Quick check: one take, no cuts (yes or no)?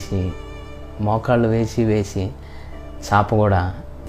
yes